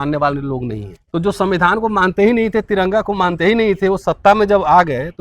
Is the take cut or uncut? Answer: cut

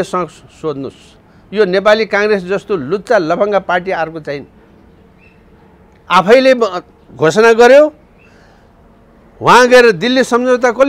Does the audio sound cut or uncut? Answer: uncut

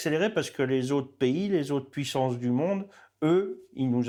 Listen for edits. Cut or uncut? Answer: uncut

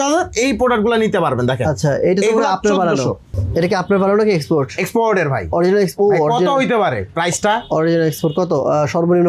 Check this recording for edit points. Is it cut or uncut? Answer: cut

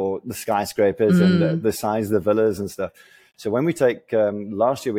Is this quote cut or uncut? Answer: uncut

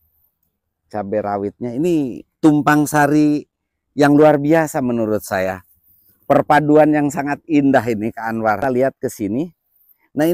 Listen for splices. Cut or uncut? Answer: cut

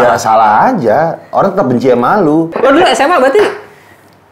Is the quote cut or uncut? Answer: cut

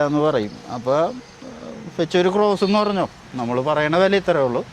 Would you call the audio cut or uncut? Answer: uncut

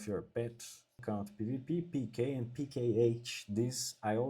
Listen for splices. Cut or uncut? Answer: cut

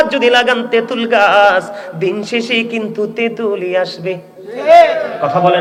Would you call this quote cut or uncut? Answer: uncut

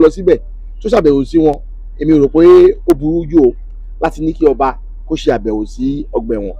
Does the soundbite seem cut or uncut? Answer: uncut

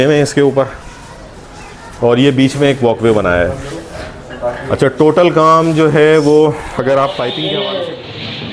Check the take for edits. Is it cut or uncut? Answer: cut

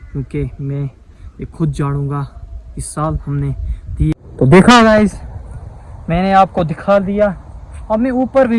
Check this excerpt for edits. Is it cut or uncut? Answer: cut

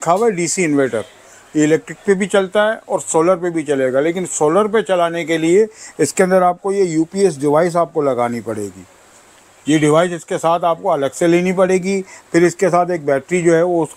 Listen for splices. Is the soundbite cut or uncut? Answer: uncut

